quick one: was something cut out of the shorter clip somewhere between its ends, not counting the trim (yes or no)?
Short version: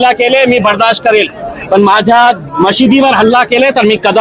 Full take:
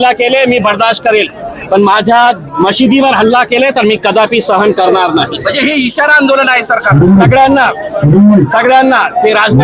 no